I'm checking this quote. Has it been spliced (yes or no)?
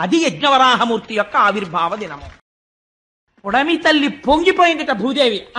yes